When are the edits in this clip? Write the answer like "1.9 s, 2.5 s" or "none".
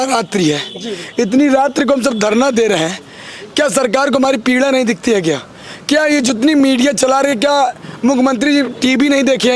none

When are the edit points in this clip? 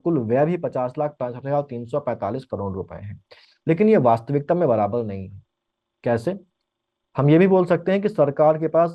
none

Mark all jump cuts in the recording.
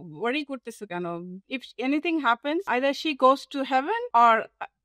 1.3 s, 2.7 s, 4.0 s

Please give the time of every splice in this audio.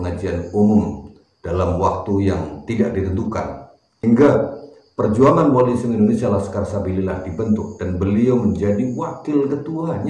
4.0 s

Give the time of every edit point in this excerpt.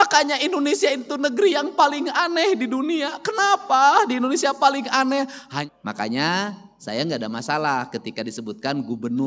5.5 s

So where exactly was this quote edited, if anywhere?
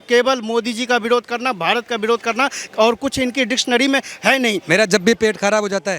4.6 s

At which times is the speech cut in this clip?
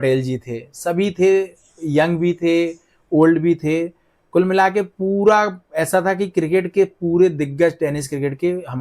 none

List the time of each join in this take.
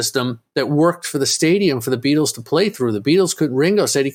none

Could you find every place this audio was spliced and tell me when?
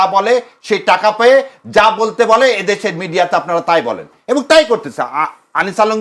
none

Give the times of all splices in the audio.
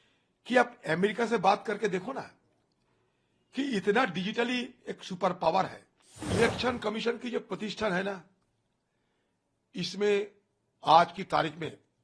6.3 s

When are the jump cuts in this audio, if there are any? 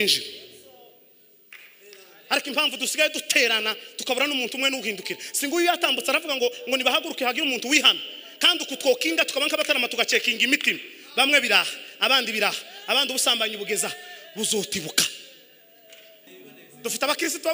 16.3 s

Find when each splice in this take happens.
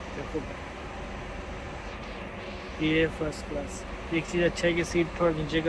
none

